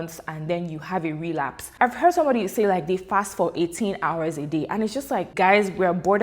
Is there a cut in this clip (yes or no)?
yes